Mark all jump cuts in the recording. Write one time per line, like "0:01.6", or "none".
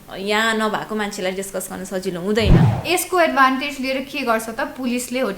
0:02.6

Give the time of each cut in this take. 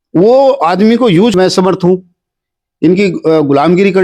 0:01.3

